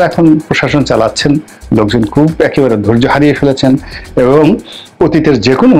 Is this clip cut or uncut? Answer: uncut